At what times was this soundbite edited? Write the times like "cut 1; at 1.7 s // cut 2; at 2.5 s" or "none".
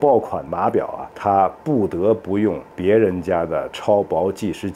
cut 1; at 1.0 s